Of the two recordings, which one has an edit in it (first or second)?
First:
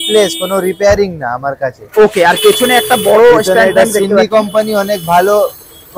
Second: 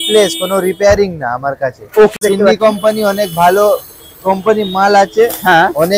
second